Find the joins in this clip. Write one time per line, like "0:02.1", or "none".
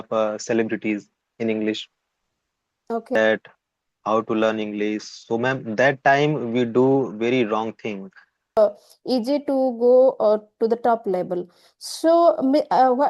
0:03.1
0:08.6